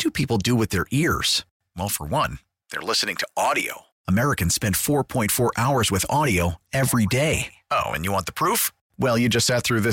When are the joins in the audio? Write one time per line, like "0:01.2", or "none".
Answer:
none

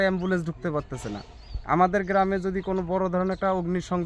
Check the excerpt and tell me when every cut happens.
none

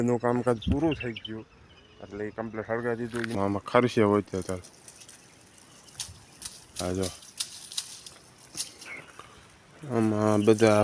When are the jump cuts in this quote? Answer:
0:03.4

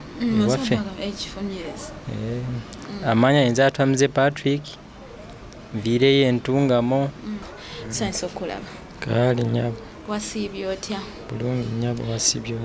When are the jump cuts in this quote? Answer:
0:07.5

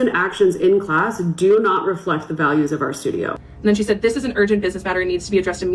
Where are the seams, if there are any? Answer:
0:03.4

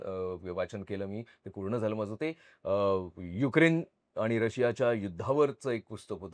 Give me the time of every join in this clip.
none

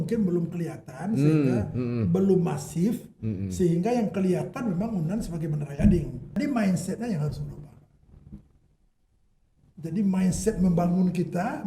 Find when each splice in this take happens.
0:06.4

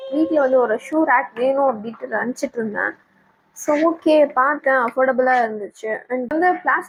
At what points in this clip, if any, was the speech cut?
none

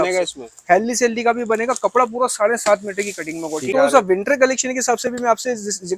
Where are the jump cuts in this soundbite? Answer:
0:03.7

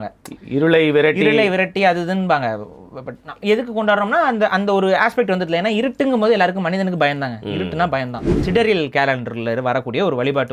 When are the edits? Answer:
0:08.4

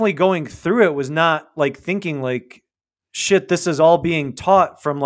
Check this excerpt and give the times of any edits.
none

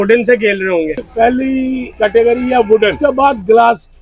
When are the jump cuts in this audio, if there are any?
0:01.1
0:01.9
0:03.0

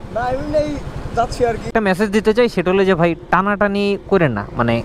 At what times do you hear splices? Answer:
0:01.7

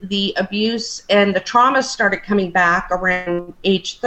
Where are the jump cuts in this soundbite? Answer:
none

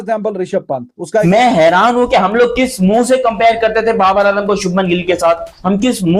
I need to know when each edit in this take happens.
0:01.2

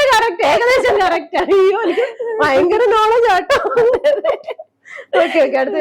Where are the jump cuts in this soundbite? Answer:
none

